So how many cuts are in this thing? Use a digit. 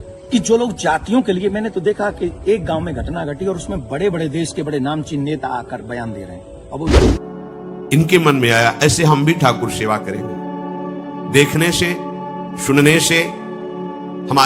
1